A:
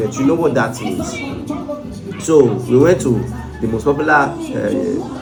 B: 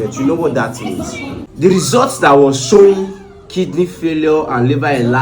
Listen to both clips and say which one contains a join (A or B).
B